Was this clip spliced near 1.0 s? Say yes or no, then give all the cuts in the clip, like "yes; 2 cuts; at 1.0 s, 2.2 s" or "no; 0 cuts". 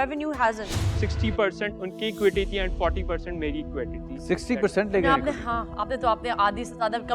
yes; 1 cut; at 1.0 s